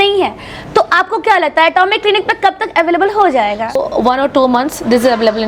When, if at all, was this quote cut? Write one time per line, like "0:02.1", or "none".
0:03.7